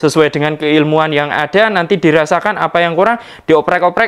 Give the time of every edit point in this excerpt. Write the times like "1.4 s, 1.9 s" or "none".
none

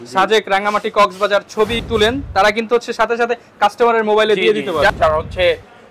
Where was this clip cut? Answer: 1.8 s, 4.9 s

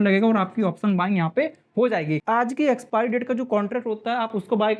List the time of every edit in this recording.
2.2 s

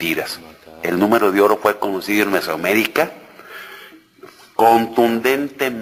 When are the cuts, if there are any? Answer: none

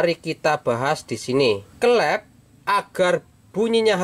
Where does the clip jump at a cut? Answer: 1.7 s

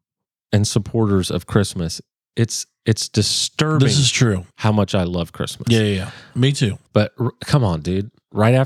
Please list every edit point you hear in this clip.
6.8 s

